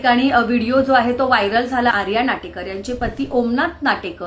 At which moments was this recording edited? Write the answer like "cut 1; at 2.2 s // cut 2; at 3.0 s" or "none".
cut 1; at 1.9 s